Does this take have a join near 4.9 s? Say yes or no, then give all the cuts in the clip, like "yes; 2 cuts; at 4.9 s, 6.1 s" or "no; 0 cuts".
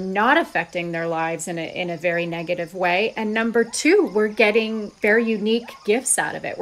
yes; 1 cut; at 4.9 s